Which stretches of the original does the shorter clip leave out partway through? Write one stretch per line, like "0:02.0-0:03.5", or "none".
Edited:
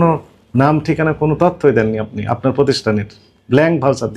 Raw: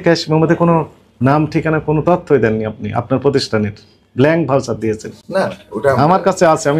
none